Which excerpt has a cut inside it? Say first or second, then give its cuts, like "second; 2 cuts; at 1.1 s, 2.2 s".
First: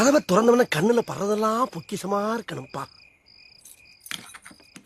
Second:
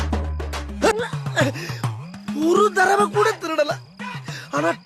second; 1 cut; at 0.9 s